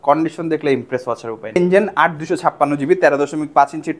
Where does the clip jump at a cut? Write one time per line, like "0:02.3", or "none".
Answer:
0:01.6